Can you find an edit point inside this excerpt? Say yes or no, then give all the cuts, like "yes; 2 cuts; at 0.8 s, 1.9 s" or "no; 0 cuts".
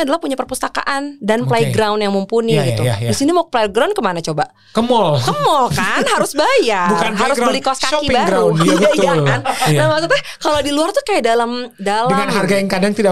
no; 0 cuts